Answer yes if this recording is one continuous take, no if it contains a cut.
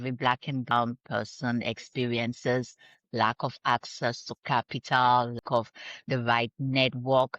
no